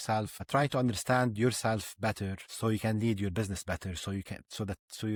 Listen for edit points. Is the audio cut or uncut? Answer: uncut